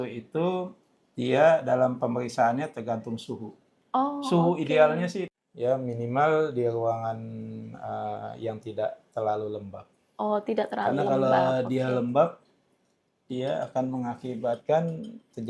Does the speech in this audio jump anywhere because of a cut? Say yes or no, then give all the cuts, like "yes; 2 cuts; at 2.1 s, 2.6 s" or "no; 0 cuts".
yes; 1 cut; at 5.3 s